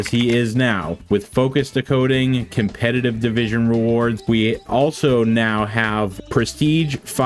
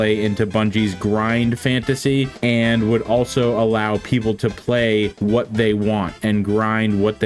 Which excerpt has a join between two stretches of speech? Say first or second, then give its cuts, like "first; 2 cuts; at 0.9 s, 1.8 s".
first; 3 cuts; at 0.9 s, 4.2 s, 6.2 s